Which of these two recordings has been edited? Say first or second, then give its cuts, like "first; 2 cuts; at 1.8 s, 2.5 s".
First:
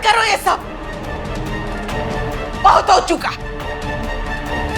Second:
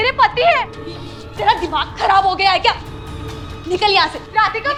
first; 1 cut; at 3.4 s